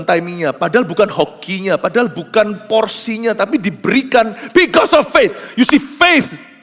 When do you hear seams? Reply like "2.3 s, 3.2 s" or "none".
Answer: 2.6 s

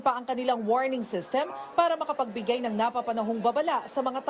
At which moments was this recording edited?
none

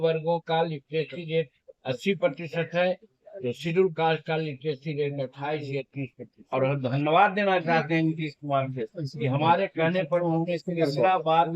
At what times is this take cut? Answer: 6.4 s

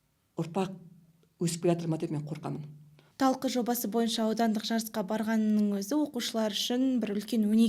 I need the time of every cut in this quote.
3.1 s

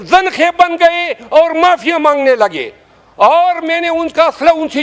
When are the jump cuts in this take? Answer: none

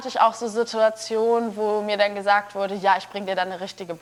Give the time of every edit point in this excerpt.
none

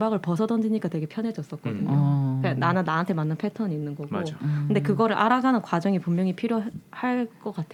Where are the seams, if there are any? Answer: none

